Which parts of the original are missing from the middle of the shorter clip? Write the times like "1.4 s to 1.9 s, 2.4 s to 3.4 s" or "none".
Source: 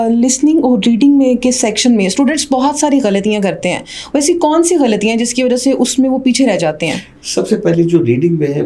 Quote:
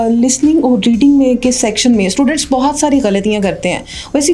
none